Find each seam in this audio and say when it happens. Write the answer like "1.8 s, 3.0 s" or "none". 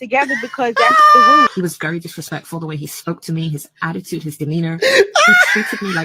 1.5 s